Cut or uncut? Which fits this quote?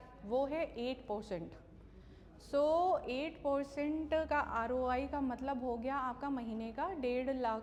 uncut